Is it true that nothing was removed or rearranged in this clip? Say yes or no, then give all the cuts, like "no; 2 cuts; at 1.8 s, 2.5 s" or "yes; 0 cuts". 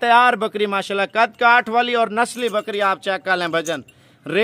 yes; 0 cuts